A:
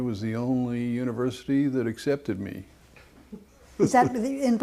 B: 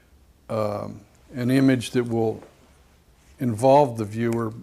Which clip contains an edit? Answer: B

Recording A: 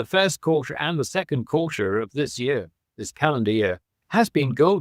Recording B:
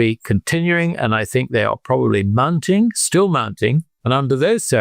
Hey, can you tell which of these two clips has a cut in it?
B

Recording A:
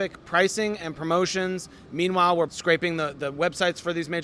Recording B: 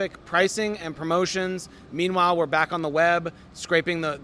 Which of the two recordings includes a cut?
A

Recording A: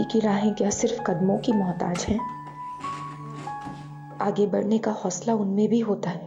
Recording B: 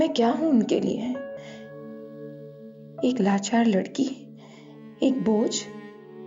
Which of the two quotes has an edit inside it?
B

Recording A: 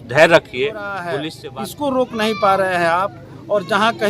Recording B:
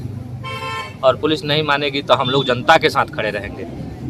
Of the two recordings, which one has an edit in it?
A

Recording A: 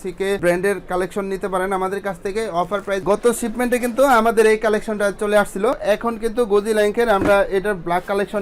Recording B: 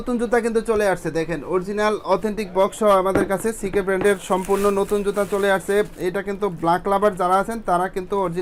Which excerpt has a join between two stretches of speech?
A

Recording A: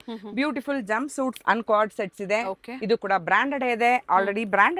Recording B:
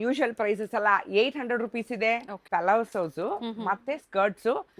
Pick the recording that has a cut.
B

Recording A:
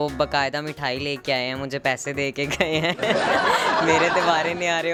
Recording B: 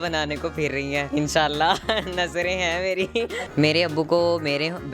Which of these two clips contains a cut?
B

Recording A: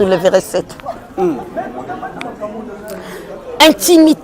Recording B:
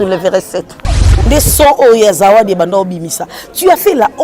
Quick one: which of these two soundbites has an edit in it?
B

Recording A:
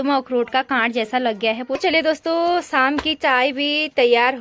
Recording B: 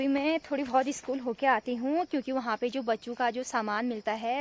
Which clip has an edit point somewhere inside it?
A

